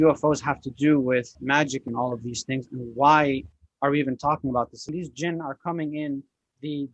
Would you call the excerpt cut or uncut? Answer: cut